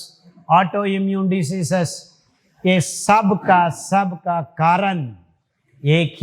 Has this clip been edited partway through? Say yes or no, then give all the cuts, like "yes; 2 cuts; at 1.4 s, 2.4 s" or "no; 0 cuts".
no; 0 cuts